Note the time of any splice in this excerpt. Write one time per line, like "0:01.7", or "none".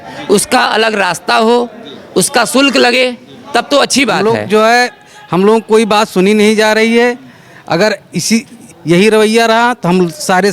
0:04.2